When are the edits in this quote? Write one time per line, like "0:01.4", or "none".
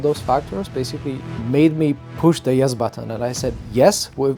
0:01.3
0:02.1